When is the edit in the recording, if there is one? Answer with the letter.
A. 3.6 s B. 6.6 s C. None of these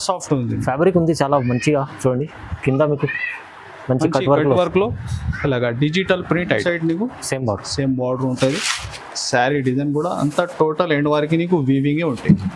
B